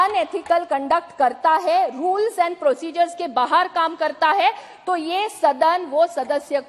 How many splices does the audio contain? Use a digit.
0